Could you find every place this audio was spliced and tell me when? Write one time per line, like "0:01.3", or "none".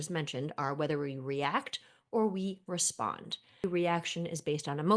0:03.6